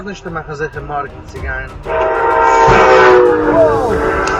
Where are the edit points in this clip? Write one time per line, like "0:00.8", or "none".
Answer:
0:03.3